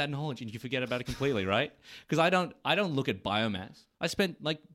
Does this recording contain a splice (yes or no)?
no